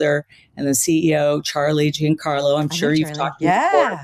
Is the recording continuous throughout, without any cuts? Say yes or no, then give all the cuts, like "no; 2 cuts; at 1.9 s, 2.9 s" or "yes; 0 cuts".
yes; 0 cuts